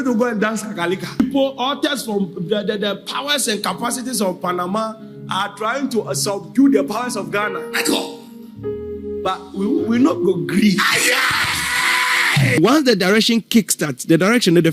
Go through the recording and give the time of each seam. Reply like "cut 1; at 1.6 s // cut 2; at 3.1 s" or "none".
cut 1; at 1.2 s // cut 2; at 12.6 s